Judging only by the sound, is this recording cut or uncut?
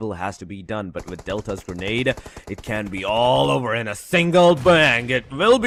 uncut